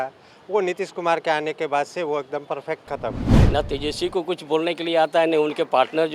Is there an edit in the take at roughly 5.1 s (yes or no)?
no